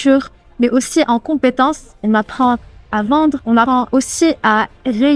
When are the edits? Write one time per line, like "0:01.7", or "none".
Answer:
0:03.8